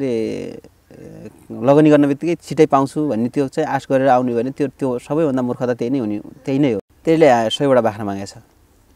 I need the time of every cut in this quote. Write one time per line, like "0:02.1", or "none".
0:06.9